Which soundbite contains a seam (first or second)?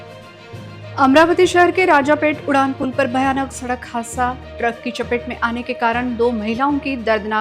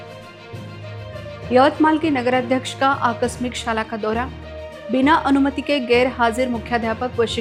first